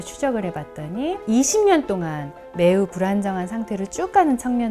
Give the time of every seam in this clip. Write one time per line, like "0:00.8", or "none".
0:01.2